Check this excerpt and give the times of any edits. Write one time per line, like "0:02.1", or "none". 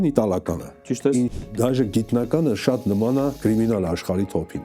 0:01.3
0:03.4